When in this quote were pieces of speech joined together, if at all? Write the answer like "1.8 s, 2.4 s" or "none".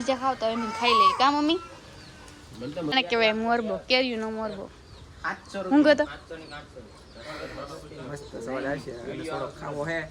2.9 s

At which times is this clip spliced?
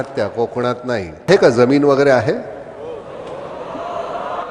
1.3 s

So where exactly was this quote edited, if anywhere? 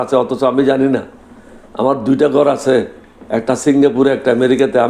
none

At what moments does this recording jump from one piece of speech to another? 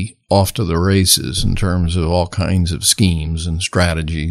none

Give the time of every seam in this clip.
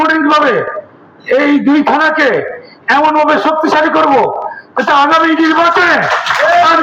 none

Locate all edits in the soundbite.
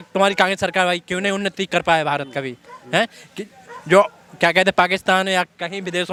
none

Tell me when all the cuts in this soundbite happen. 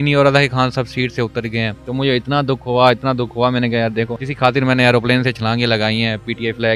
1.8 s, 4.2 s

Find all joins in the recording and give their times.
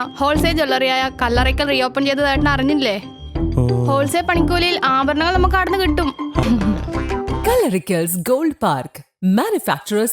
6.4 s

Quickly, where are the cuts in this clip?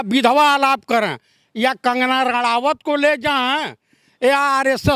none

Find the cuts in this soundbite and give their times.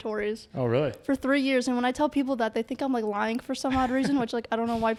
none

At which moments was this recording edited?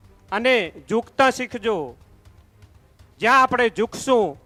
none

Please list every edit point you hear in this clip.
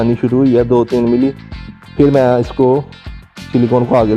none

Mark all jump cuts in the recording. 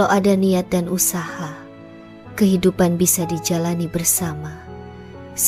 none

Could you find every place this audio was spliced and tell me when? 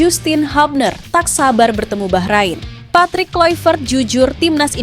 2.7 s

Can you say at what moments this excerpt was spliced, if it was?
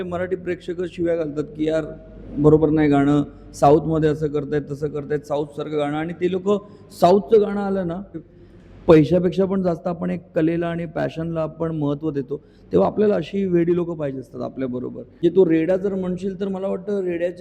8.3 s, 15.2 s

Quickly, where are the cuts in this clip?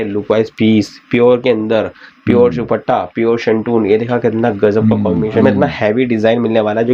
5.4 s

